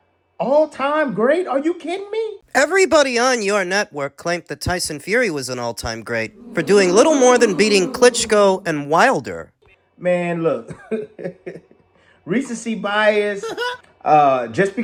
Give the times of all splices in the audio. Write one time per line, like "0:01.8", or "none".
none